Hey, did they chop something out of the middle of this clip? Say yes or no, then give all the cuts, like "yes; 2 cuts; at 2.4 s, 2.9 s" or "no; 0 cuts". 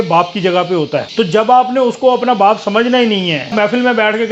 yes; 2 cuts; at 1.1 s, 3.5 s